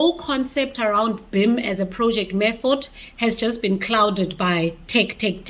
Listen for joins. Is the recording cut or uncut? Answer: uncut